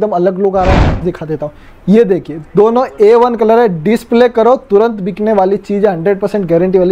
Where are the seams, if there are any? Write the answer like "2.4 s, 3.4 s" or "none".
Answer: 1.1 s